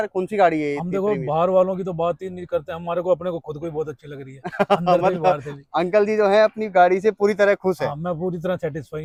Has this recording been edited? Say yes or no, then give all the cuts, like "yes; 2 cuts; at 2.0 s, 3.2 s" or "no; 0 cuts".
no; 0 cuts